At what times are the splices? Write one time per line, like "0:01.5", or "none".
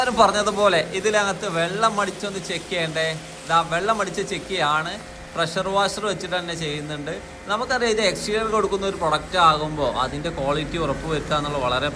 none